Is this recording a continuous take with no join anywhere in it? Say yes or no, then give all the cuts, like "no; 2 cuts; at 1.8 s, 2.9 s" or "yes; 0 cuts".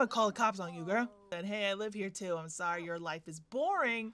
no; 1 cut; at 1.2 s